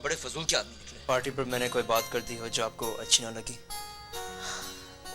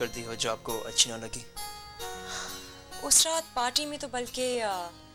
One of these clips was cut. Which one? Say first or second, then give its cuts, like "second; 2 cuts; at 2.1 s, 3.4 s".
first; 1 cut; at 1.0 s